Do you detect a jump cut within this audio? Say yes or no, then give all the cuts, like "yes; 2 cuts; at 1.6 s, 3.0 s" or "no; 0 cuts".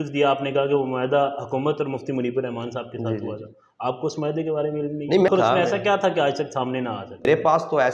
yes; 2 cuts; at 5.3 s, 7.3 s